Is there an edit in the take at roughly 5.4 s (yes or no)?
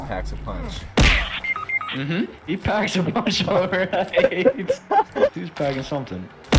yes